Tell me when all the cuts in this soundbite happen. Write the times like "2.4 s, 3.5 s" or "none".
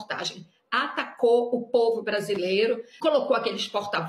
2.9 s

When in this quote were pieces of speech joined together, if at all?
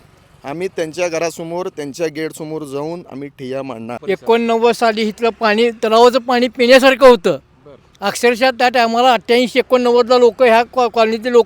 4.0 s

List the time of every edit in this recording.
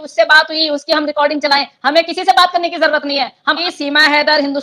3.5 s

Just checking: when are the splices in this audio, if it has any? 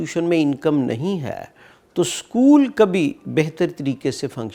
none

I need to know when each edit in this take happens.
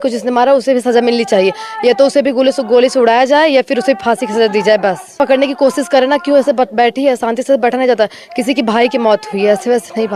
5.2 s

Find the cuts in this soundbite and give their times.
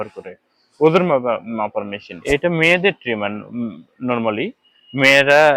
2.1 s

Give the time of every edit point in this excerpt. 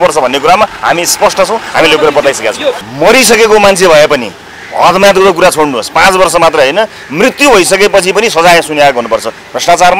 2.9 s

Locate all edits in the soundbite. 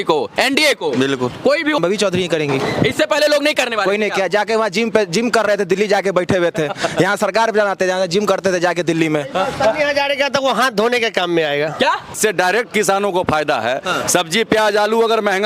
1.8 s, 12.2 s

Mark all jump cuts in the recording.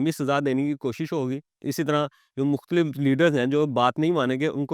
none

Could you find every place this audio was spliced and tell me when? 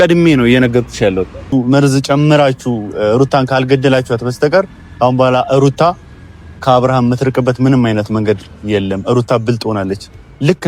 1.5 s

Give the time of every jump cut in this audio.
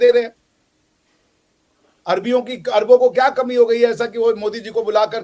none

